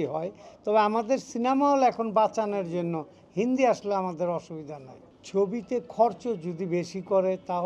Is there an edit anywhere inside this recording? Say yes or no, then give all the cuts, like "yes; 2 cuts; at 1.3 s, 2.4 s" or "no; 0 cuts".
yes; 1 cut; at 5.2 s